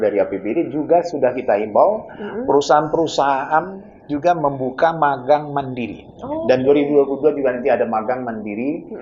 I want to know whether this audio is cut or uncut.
uncut